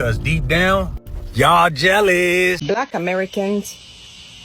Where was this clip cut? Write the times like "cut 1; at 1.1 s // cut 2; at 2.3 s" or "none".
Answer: cut 1; at 2.6 s